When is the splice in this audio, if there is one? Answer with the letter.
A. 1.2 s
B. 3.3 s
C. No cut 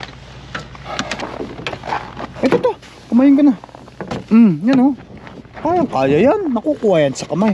A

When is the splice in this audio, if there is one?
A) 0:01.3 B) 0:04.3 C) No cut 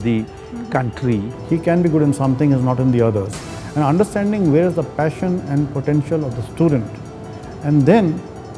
A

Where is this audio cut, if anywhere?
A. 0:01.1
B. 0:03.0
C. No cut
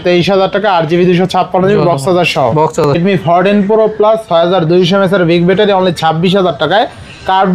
B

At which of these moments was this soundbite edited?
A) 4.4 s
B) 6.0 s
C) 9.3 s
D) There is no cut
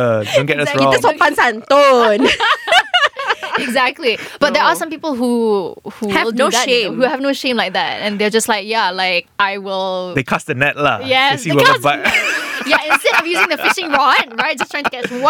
A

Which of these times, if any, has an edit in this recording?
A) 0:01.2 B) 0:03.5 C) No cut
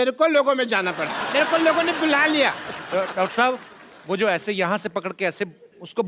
A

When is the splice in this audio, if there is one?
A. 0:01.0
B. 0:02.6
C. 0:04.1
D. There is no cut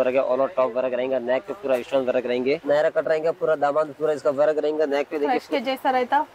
B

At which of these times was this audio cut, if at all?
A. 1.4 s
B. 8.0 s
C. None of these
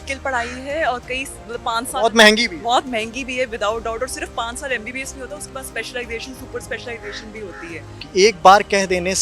B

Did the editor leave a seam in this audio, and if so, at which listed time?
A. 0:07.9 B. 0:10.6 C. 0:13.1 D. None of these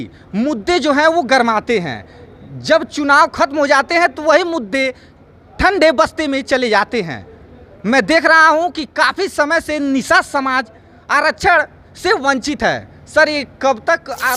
D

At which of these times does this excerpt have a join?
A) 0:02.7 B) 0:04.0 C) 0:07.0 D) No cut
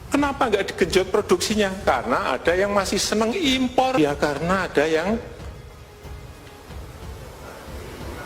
B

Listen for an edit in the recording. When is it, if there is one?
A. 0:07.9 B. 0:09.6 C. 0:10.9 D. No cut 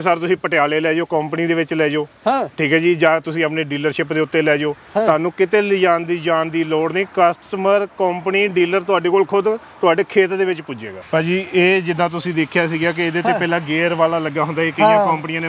C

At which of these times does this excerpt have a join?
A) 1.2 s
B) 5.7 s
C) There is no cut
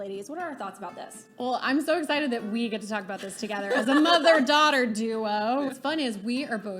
B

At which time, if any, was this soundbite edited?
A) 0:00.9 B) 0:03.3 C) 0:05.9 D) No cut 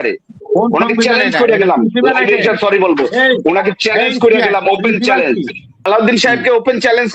C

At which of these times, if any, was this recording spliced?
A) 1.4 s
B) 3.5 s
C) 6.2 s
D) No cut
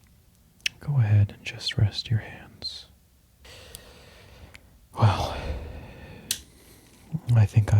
B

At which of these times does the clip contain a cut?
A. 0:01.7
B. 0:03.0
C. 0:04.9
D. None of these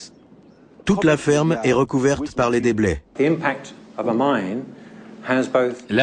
B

